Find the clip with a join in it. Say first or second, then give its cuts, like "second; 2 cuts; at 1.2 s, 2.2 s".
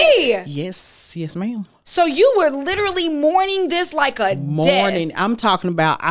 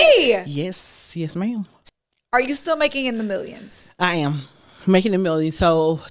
second; 1 cut; at 1.7 s